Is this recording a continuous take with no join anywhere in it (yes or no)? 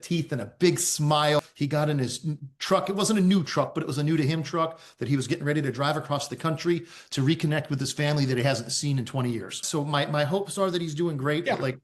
no